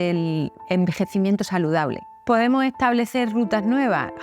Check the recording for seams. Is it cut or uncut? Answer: cut